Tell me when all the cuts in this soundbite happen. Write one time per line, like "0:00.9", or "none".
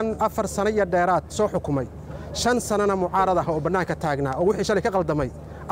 none

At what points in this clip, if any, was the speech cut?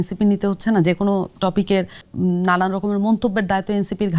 0:02.0

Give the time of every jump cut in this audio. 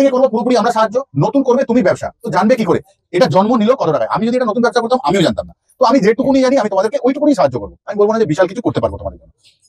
none

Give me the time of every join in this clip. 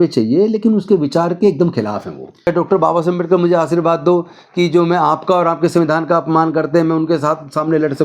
0:02.5

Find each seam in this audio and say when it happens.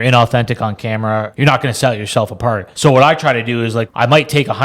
0:01.3
0:02.7
0:03.9

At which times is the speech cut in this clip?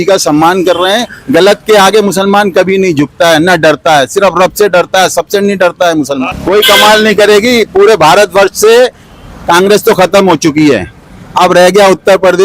0:06.3

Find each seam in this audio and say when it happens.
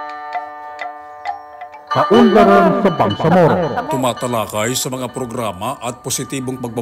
0:02.0

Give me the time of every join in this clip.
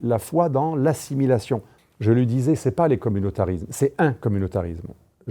0:01.8

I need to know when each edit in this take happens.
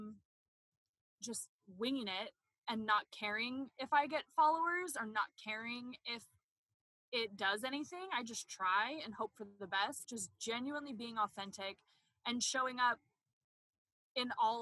0:10.0

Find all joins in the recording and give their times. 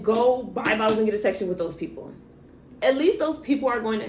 none

